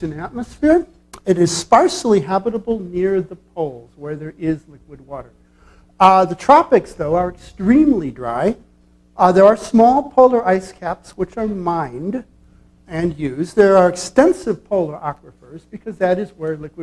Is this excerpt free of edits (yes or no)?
no